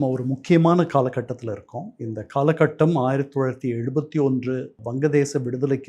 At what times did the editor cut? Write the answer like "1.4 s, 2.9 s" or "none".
4.8 s